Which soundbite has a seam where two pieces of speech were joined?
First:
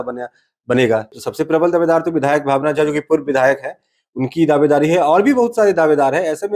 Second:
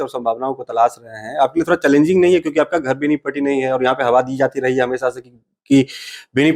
first; 1 cut; at 1.2 s

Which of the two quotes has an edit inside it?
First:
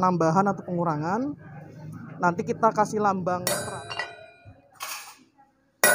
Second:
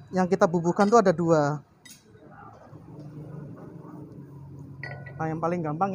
first; 1 cut; at 3.4 s

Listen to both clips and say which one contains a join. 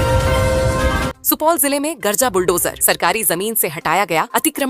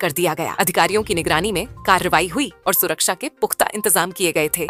first; 1 cut; at 1.1 s

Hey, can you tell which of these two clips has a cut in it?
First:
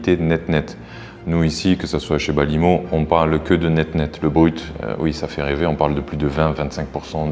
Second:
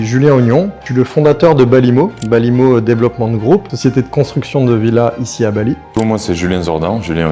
second; 4 cuts; at 0.8 s, 2.2 s, 3.7 s, 5.9 s

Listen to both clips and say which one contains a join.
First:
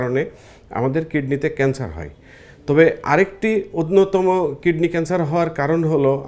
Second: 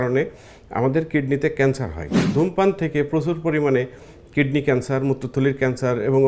second; 1 cut; at 2.1 s

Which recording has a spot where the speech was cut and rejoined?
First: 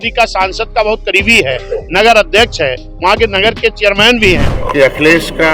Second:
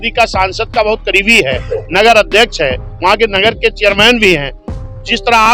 first; 1 cut; at 4.5 s

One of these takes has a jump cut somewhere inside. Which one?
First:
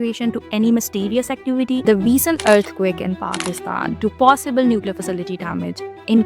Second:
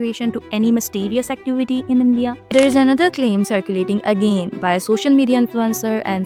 first; 1 cut; at 1.8 s

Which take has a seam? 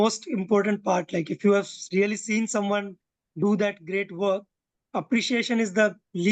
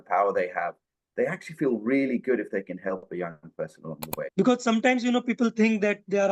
second; 1 cut; at 4.2 s

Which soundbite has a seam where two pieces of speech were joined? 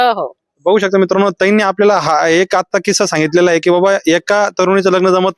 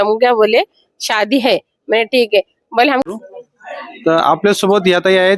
second; 1 cut; at 3.1 s

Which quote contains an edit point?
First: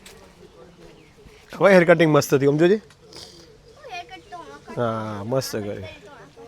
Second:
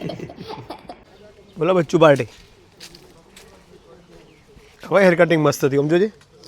second; 1 cut; at 1.0 s

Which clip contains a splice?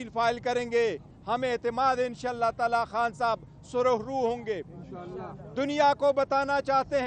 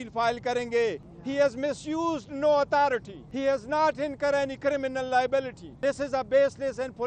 second; 3 cuts; at 1.1 s, 3.2 s, 5.6 s

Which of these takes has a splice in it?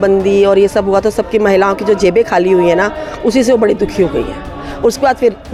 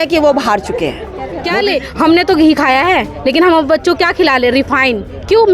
second; 1 cut; at 1.3 s

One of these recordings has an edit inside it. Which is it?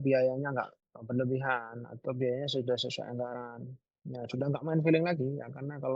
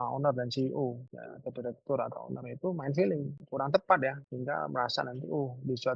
second; 2 cuts; at 3.4 s, 4.3 s

